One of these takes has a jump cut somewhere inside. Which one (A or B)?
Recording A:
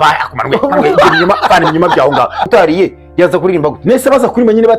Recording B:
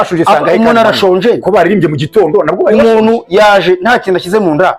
A